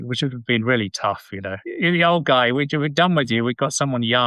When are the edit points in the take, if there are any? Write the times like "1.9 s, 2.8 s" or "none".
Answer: 1.6 s

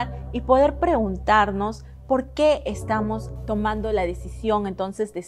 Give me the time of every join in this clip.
3.3 s

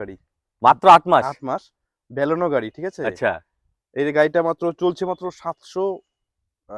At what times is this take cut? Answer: none

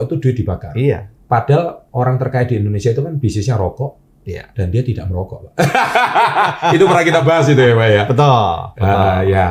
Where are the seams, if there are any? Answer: none

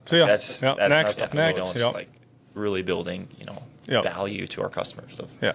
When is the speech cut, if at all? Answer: 2.1 s

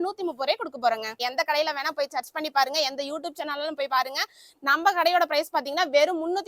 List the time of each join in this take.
1.2 s

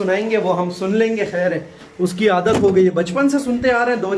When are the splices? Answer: none

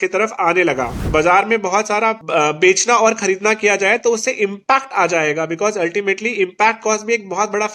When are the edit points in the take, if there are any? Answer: 1.0 s, 2.2 s

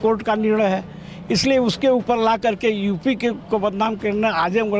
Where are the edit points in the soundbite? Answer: none

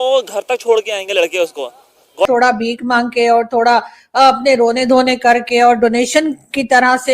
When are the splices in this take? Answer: 2.2 s

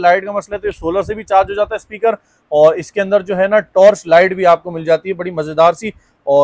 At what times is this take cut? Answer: none

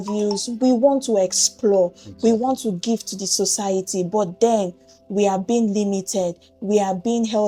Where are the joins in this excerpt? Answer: none

